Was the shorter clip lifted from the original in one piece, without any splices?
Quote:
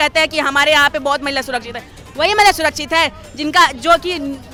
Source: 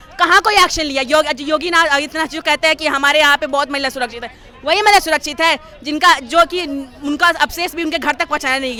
yes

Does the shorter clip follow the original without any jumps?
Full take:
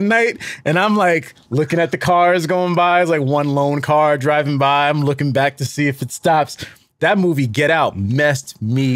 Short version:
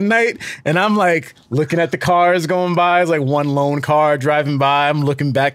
yes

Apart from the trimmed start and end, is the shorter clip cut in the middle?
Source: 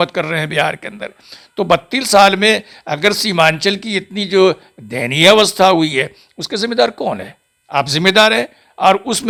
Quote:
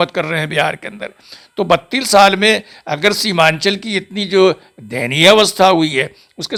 no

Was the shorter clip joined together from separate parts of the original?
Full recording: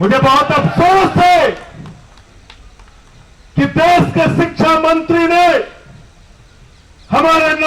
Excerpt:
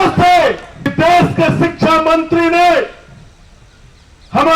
yes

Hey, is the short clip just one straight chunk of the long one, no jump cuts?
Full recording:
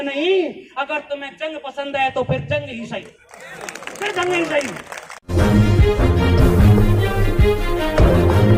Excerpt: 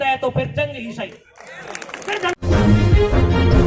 no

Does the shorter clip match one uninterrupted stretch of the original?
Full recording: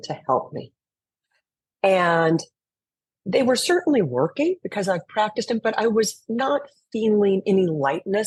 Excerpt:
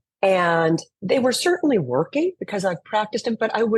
no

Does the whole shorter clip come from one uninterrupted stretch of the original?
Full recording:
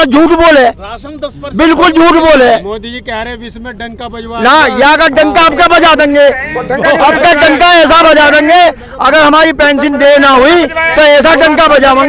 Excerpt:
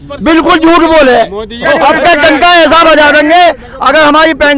no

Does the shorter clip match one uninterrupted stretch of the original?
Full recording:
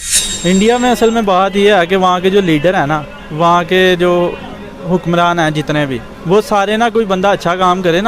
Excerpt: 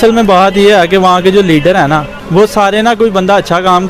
no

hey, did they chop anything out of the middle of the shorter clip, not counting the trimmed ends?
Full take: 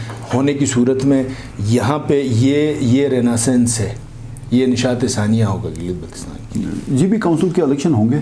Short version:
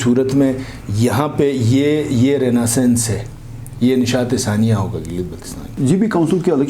yes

